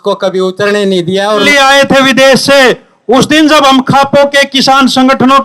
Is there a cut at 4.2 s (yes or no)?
no